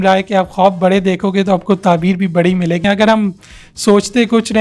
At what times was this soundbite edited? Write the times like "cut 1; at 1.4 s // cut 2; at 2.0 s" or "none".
cut 1; at 2.8 s